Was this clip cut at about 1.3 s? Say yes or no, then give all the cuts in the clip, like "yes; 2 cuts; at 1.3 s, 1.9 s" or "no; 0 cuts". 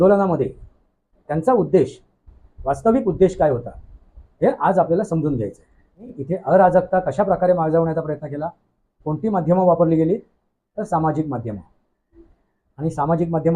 no; 1 cut; at 6.2 s